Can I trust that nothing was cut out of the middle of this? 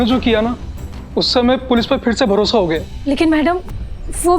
no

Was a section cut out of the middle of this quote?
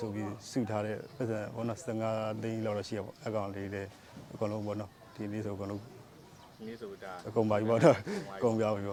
no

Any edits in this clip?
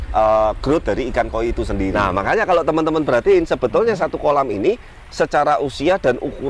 yes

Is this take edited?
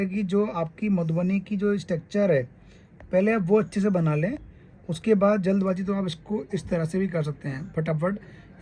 no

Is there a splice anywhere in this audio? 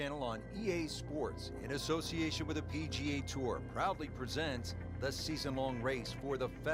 no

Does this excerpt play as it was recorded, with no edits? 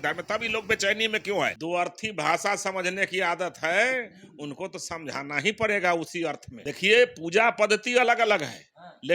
no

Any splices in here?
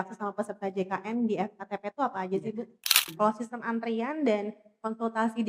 yes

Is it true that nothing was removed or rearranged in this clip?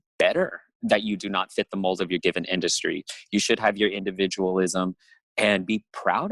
yes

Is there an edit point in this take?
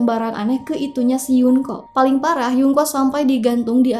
yes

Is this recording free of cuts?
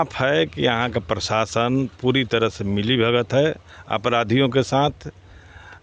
yes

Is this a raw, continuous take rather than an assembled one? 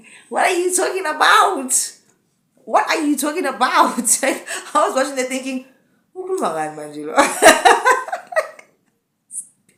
yes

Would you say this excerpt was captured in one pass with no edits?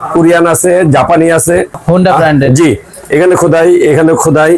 no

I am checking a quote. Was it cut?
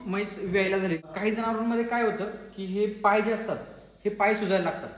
yes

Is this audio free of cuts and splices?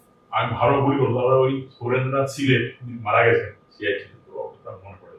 yes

